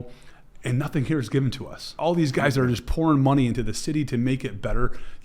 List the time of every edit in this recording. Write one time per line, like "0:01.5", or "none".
0:02.0

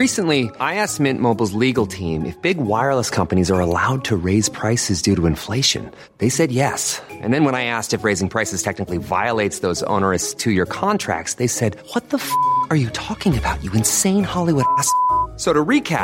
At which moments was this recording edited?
none

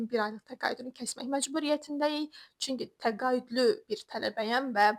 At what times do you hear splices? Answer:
none

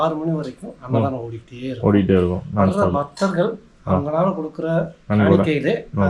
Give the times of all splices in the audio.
none

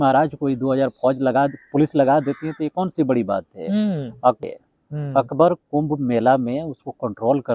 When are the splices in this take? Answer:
0:04.4

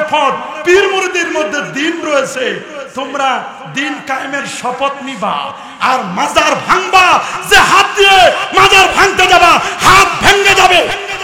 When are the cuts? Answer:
none

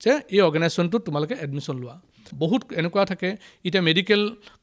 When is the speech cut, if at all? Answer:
0:02.2

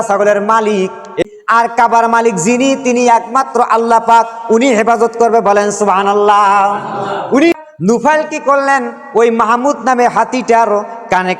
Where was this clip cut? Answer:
0:01.2
0:07.5

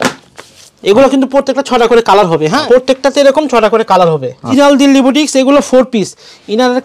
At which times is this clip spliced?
0:02.6
0:04.5

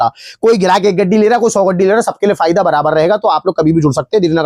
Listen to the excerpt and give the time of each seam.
none

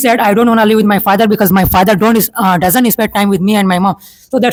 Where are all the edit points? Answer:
none

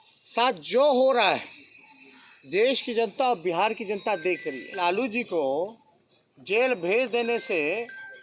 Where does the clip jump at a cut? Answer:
0:04.8

